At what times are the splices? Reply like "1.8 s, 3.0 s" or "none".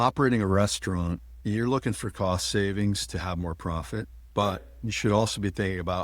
1.3 s, 4.2 s